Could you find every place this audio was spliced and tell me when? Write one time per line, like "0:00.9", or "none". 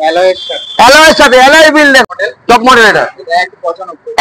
0:02.0